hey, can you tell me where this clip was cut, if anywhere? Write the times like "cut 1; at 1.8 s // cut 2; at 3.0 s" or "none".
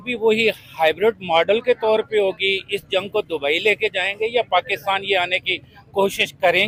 none